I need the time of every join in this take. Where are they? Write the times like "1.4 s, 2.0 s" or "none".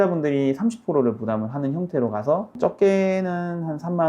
2.5 s